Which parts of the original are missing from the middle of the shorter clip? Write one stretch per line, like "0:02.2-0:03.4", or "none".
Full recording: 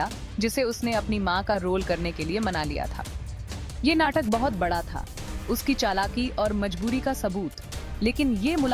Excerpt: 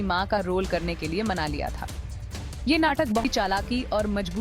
0:04.4-0:05.7

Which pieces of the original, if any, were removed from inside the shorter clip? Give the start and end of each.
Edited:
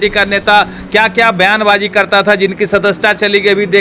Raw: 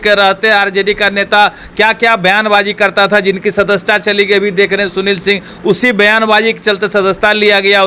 none

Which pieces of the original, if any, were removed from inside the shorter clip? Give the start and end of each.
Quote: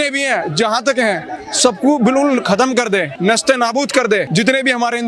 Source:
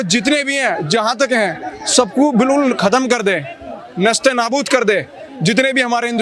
0:03.4-0:03.9
0:05.0-0:05.4

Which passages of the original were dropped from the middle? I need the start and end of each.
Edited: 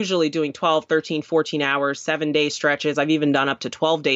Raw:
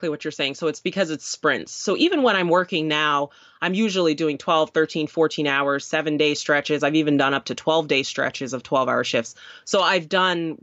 none

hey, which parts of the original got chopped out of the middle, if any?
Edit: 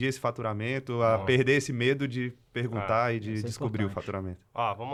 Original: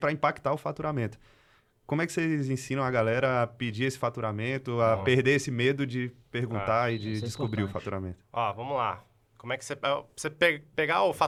none

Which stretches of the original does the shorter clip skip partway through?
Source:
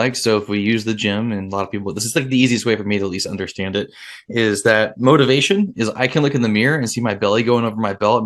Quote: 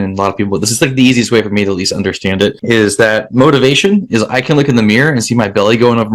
0:03.9-0:04.2

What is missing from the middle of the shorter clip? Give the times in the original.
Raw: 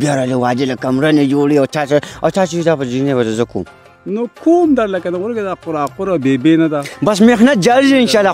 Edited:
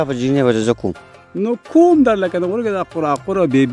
none

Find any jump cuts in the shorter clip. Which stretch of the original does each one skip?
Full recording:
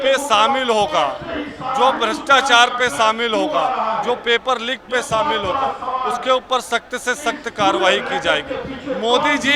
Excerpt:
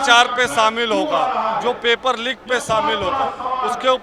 none

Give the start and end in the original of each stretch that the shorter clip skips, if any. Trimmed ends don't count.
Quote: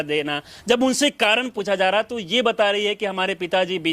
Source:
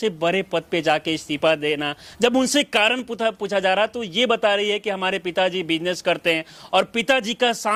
0:03.1-0:03.4

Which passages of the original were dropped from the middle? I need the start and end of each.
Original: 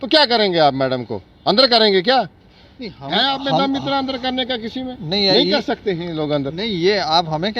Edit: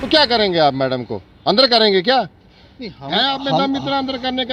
none

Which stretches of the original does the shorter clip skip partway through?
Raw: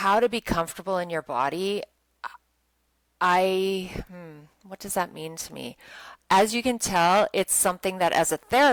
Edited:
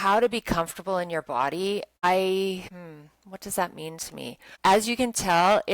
0:02.0-0:03.3
0:04.0-0:04.1
0:05.8-0:06.1

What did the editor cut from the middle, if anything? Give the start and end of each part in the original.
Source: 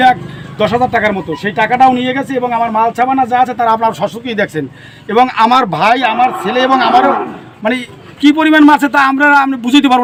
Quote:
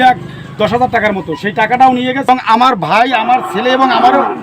0:02.3-0:05.2

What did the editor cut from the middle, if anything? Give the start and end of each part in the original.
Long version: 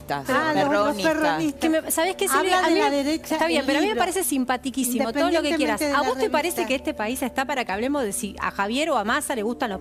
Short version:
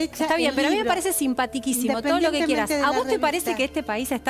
none

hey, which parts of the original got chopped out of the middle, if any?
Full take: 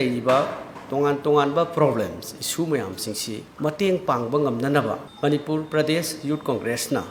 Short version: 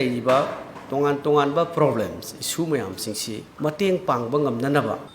none

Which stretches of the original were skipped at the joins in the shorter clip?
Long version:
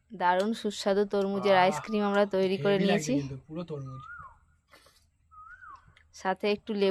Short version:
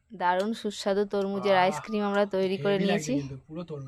none

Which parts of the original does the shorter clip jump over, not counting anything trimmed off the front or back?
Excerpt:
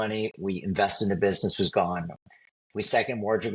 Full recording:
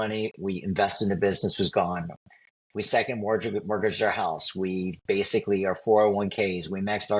none

